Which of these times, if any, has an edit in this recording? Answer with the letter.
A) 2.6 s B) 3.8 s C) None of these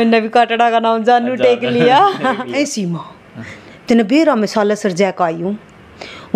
A